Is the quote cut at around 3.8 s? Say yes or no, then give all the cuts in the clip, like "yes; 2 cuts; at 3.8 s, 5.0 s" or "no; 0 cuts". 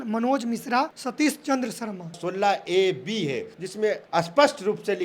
yes; 3 cuts; at 1.0 s, 2.2 s, 3.8 s